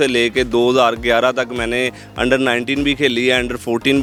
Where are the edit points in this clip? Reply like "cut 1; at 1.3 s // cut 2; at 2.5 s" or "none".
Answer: none